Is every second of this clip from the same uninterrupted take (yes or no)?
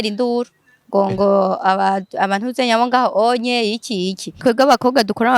no